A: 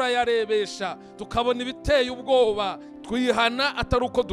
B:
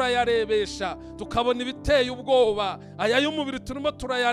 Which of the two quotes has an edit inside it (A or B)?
A